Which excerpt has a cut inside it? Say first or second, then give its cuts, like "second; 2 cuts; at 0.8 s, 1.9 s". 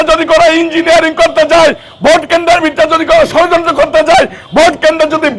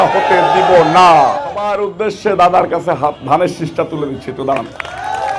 second; 1 cut; at 1.8 s